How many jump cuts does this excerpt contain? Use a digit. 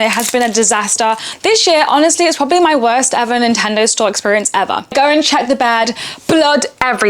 2